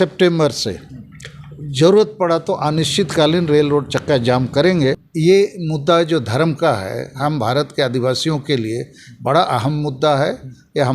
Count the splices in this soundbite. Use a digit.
1